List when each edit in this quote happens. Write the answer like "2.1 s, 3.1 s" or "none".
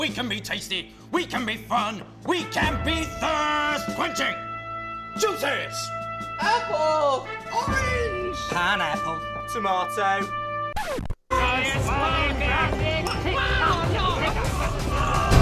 none